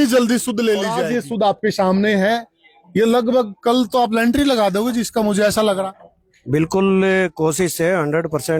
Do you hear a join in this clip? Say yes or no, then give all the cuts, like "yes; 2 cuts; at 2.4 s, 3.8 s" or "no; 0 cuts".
no; 0 cuts